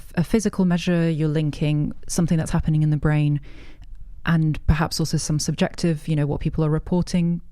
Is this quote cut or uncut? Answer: uncut